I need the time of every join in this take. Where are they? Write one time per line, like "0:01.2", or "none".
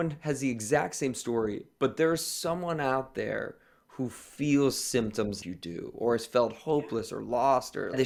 none

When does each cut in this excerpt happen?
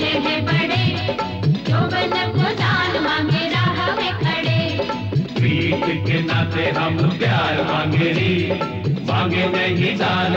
none

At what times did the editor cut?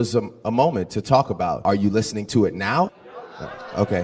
none

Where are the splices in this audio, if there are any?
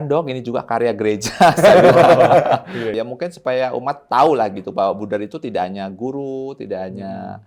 0:02.8

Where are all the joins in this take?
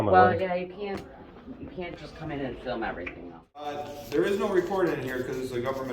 0:03.8

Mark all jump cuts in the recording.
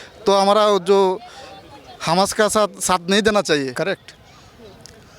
0:03.7

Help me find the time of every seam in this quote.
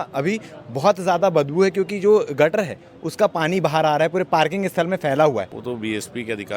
0:05.6

